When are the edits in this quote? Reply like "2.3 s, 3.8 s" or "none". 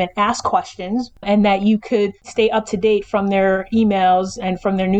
1.2 s, 2.3 s

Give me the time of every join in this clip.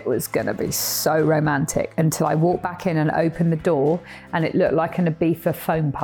none

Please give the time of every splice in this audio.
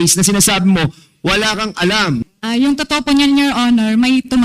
2.2 s

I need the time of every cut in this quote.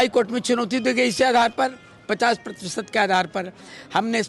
none

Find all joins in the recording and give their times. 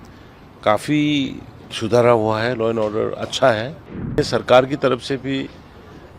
4.2 s

